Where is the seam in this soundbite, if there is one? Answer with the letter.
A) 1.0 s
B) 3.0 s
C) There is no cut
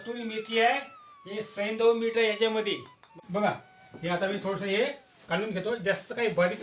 B